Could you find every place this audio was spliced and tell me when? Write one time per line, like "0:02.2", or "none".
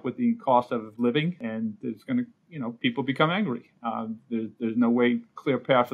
0:01.4